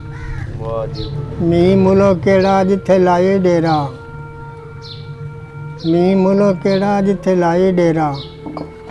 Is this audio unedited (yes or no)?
no